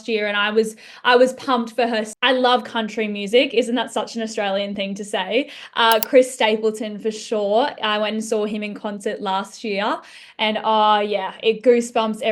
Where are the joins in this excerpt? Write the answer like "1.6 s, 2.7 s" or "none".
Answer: 2.1 s